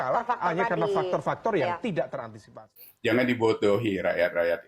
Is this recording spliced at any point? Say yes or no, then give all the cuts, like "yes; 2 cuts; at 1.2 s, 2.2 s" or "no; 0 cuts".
yes; 1 cut; at 2.7 s